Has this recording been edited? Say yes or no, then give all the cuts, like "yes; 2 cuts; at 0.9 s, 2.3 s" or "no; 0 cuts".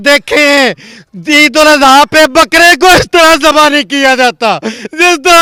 no; 0 cuts